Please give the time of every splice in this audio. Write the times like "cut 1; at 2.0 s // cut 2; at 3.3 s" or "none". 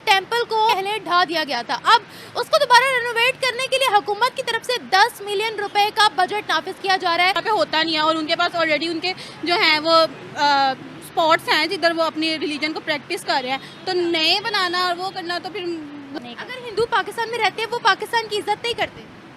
cut 1; at 0.7 s // cut 2; at 7.4 s // cut 3; at 16.1 s